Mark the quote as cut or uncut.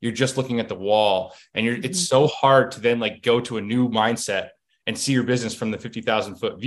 uncut